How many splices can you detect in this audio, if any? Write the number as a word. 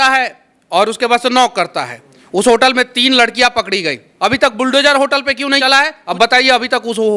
two